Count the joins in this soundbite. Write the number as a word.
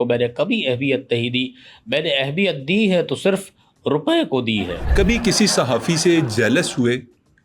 one